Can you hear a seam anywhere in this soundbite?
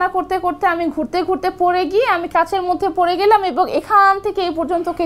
no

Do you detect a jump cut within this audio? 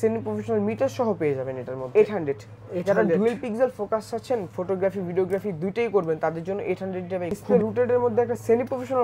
yes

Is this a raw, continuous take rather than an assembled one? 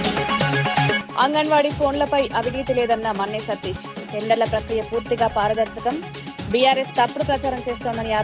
no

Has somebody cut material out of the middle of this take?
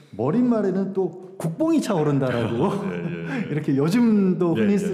no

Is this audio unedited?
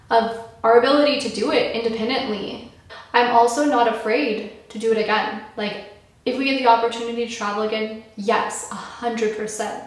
no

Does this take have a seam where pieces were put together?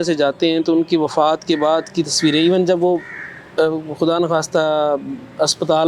no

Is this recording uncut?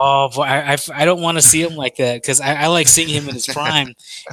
yes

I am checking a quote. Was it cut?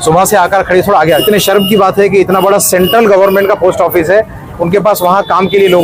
yes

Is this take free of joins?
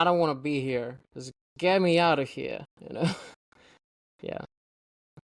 yes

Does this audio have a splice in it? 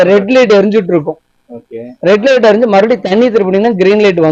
no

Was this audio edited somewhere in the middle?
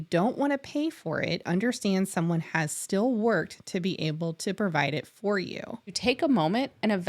yes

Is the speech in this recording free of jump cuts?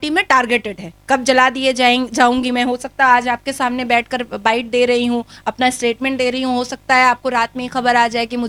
yes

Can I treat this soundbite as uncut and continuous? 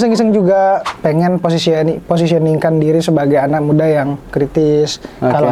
no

